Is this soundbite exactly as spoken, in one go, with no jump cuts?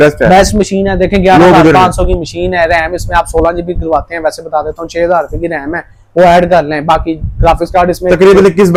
yes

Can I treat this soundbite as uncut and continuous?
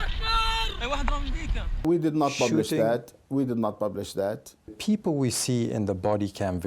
no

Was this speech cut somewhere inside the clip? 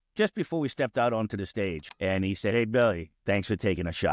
yes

